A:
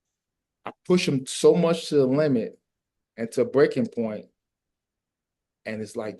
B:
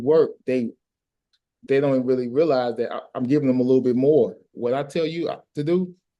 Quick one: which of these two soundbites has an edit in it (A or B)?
B